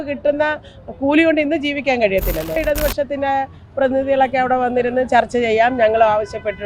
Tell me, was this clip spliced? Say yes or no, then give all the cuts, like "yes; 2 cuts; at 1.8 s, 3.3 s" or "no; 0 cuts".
yes; 1 cut; at 2.6 s